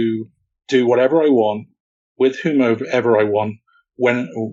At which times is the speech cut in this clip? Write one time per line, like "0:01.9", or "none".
none